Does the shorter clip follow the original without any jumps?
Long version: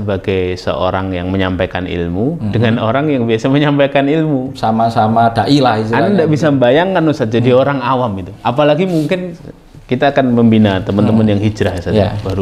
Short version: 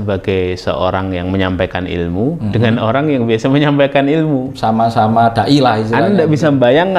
yes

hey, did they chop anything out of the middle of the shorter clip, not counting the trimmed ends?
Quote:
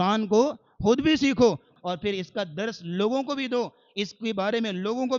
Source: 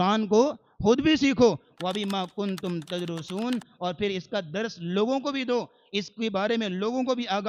yes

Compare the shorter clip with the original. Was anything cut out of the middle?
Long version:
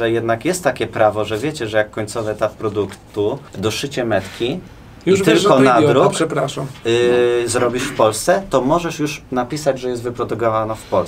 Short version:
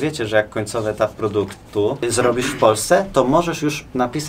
yes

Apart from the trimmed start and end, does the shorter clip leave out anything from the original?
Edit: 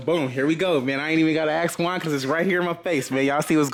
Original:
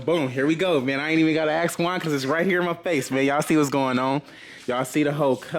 no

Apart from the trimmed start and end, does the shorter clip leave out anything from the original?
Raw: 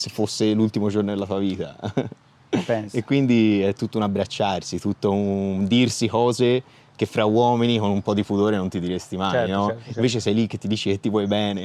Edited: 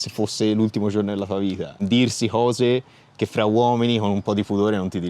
yes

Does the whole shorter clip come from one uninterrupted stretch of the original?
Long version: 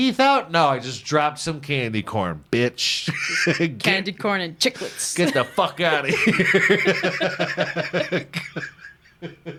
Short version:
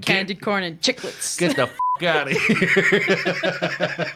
yes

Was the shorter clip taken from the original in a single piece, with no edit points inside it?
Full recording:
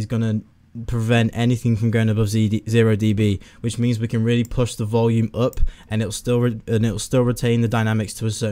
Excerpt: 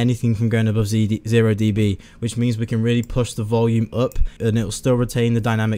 no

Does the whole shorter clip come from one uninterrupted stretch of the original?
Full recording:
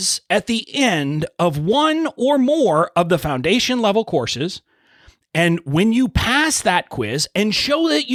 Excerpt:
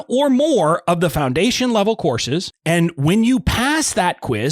no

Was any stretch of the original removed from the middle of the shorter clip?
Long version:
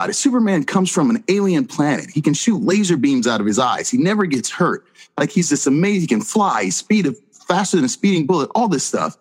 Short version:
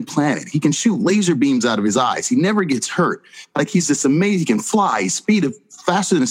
no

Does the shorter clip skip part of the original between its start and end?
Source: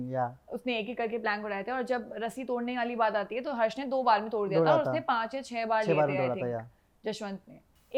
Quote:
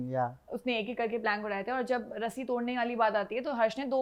no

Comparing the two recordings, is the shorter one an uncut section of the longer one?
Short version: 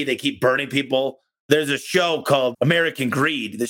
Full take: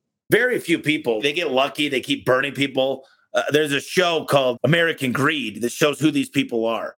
no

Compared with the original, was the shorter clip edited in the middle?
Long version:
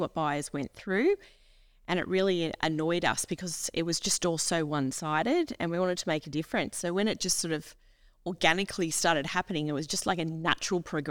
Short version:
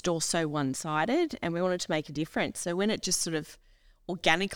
no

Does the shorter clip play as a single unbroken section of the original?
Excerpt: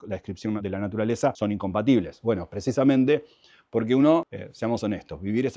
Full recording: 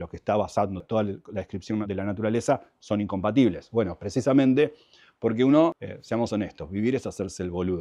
no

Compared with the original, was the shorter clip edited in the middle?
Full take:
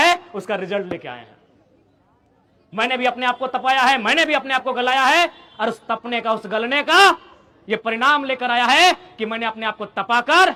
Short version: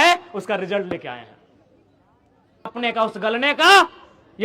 yes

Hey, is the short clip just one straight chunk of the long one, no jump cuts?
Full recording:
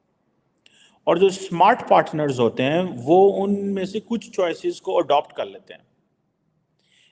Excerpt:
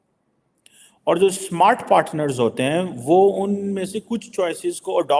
yes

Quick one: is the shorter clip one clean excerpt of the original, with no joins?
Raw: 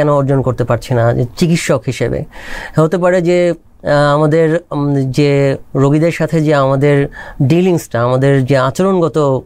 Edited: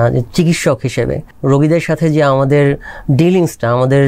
no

